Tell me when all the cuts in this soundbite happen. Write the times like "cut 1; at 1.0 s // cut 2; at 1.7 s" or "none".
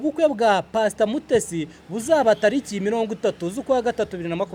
none